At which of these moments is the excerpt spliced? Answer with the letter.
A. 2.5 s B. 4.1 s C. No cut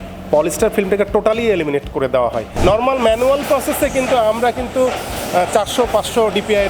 A